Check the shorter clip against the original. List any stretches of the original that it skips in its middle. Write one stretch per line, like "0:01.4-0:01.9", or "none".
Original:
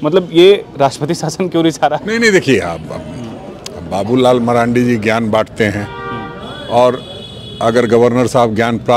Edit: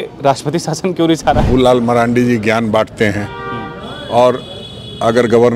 0:02.0-0:04.1